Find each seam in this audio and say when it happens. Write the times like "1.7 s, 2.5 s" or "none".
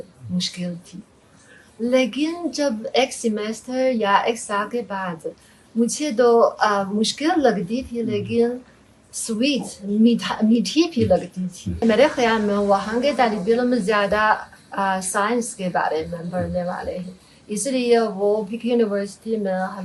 11.8 s